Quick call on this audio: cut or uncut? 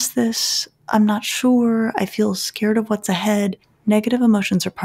cut